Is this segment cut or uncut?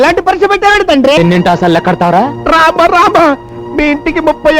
cut